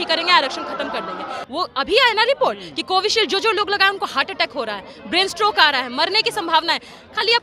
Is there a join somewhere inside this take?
yes; 1 cut; at 1.3 s

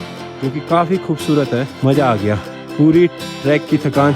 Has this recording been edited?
yes; 2 cuts; at 1.7 s, 2.6 s

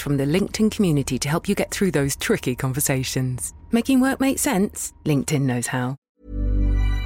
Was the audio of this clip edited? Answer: yes; 1 cut; at 6.1 s

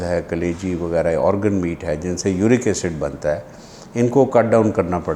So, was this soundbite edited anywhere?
no; 0 cuts

